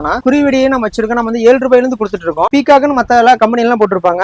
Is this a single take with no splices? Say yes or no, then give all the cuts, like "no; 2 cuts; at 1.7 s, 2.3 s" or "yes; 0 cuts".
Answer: no; 1 cut; at 2.5 s